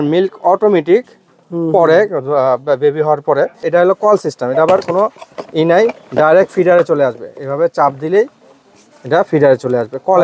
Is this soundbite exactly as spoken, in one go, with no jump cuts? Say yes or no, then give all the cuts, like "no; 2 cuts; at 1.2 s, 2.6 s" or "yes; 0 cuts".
no; 1 cut; at 3.6 s